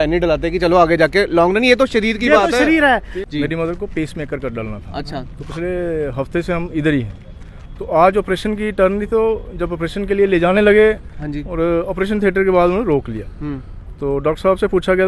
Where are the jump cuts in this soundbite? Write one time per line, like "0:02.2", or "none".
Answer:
0:03.2